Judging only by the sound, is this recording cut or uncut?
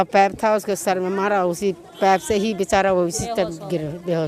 uncut